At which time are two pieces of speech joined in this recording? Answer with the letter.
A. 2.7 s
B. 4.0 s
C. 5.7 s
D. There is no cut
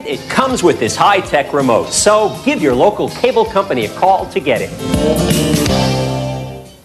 C